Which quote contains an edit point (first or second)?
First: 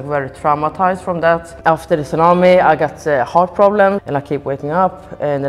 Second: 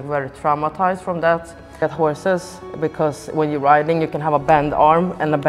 first